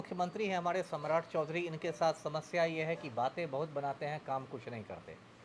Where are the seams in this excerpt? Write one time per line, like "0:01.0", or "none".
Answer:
none